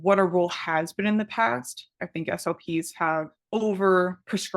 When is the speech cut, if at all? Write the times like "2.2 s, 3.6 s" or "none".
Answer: 2.0 s